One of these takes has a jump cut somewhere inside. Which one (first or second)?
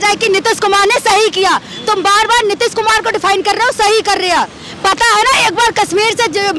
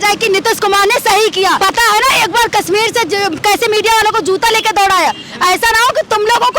second